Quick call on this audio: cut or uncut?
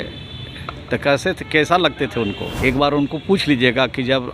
cut